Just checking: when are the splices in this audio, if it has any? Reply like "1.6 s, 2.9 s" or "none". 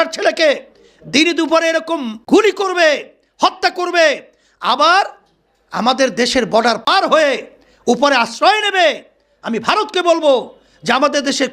2.1 s, 6.9 s

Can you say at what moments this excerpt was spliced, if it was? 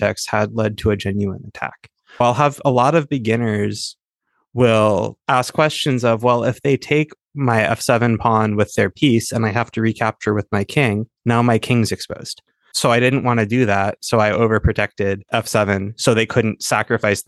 2.2 s

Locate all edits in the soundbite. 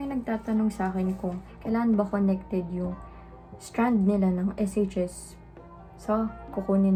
none

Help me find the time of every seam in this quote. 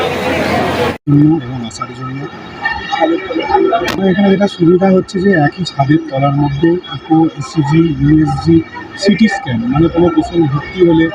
none

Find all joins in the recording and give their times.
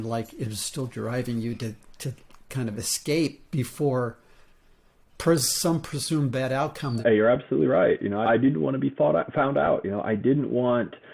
7.0 s, 8.2 s

